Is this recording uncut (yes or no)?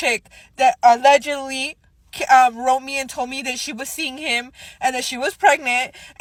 yes